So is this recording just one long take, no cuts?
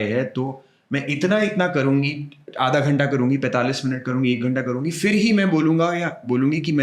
yes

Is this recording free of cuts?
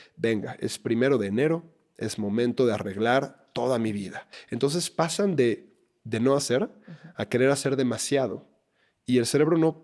no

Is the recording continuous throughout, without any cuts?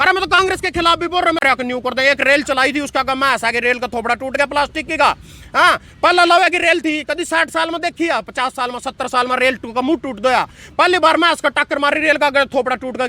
no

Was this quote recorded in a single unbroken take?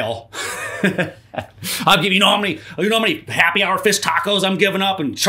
yes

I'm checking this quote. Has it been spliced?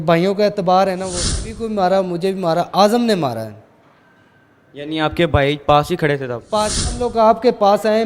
yes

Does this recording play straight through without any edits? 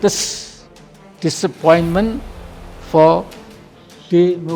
yes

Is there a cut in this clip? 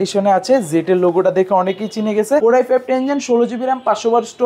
yes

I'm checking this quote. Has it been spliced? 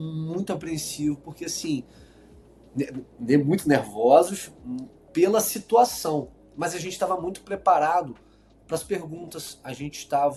no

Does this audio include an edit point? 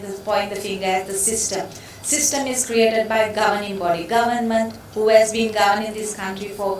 no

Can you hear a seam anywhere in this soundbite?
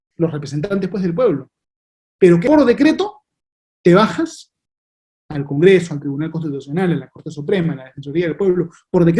yes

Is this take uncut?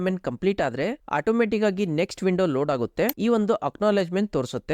no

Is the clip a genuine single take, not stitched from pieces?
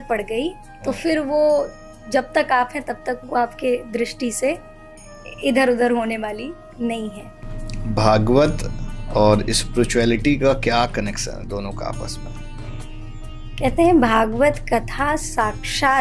no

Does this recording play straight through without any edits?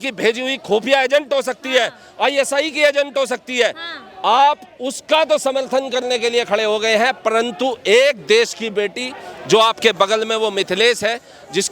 yes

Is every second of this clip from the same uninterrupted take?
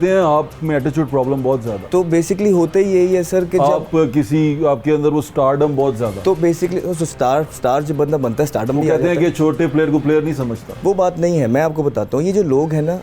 yes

